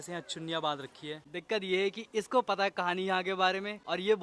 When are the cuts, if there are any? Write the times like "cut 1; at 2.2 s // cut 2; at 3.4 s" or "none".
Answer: cut 1; at 1.3 s